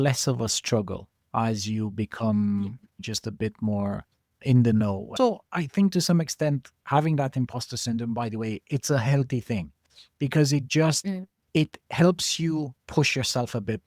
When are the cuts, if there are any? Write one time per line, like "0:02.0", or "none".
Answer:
0:05.1